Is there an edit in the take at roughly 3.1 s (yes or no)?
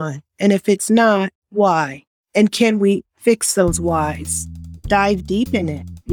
no